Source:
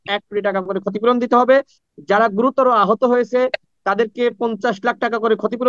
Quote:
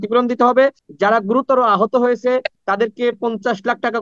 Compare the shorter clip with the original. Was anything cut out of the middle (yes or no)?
yes